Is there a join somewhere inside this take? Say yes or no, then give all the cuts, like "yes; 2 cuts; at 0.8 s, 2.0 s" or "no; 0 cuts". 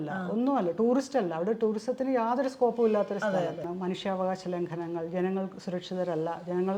yes; 1 cut; at 3.7 s